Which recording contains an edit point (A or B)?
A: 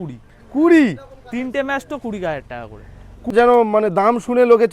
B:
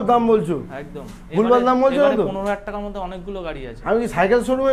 A